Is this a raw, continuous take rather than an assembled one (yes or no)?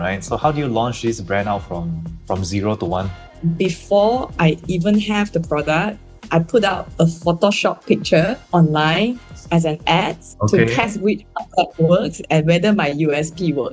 yes